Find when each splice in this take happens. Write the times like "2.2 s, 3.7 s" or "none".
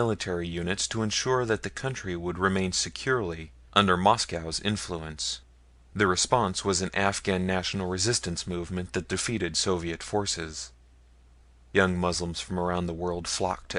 6.2 s